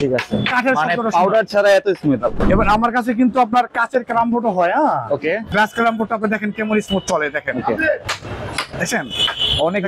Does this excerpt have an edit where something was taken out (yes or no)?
yes